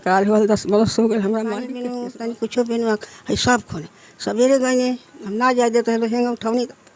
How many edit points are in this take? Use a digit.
1